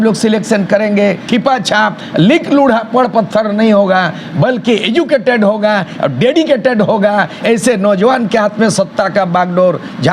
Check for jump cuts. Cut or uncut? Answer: cut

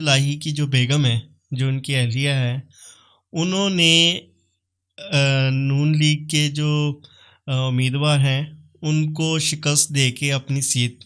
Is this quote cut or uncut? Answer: uncut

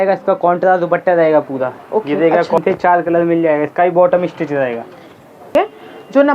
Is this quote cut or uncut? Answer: cut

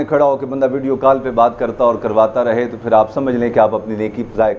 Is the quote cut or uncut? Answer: uncut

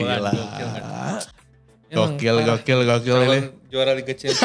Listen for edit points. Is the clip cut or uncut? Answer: uncut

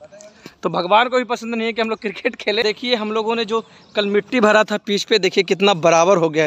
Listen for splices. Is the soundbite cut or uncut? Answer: cut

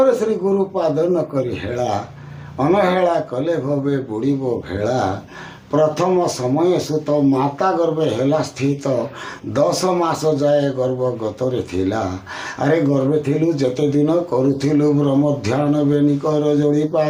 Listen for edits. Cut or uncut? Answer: uncut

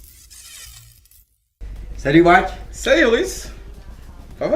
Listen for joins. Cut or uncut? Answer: uncut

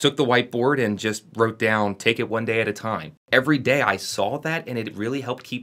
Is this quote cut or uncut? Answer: cut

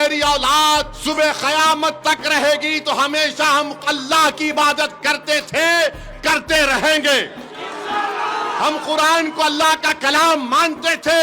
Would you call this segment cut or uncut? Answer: cut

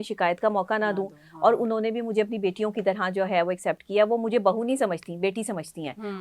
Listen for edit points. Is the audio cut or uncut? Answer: uncut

